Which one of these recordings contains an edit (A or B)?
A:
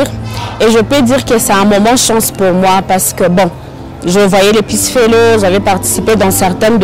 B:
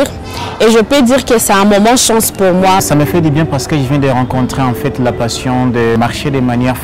B